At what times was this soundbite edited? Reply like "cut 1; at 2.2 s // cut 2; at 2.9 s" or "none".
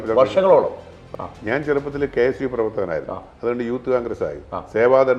cut 1; at 1.1 s